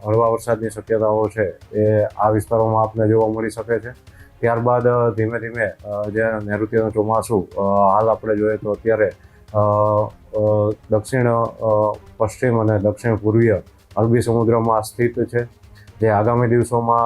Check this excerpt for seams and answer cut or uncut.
uncut